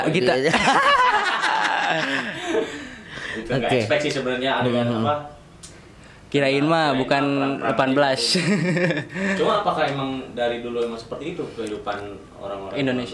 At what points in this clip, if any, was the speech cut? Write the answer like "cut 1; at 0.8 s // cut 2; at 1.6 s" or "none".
none